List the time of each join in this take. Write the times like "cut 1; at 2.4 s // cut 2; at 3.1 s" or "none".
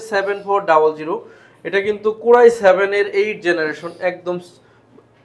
none